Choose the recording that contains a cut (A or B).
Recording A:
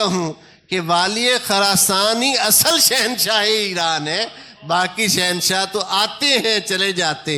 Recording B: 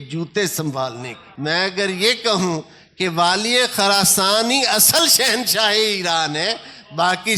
B